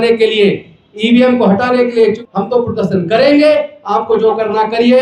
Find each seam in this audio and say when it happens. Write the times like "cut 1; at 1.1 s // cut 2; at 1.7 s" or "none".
cut 1; at 2.2 s